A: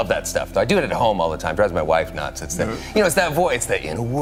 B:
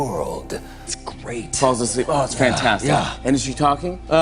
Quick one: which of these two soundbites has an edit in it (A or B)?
B